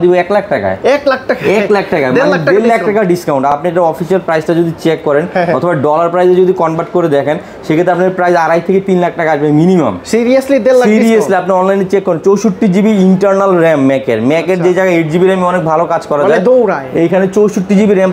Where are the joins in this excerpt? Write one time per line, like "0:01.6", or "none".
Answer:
none

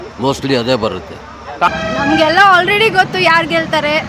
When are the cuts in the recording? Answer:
0:01.7

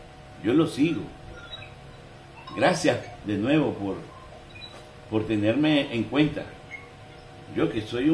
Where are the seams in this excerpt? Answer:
none

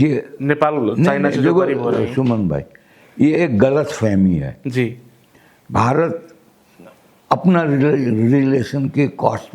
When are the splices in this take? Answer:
none

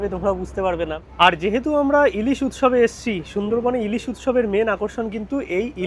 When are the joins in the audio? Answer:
0:01.0

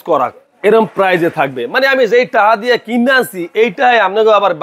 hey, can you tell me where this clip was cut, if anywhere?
none

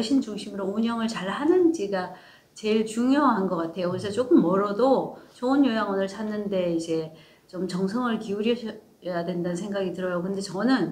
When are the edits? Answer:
none

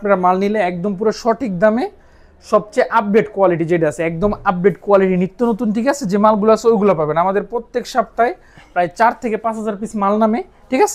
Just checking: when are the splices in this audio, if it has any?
none

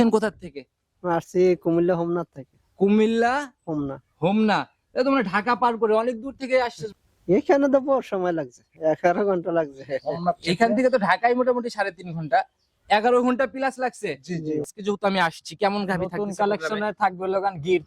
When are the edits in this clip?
0:06.8
0:14.7

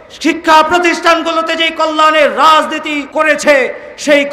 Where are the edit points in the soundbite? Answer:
0:03.0

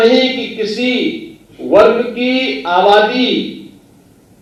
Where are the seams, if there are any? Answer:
none

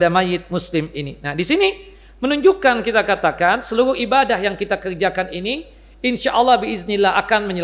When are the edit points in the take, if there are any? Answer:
none

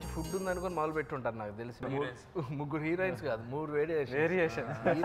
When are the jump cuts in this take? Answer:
0:01.8

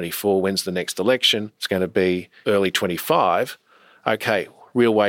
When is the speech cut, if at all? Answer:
0:01.5
0:02.3

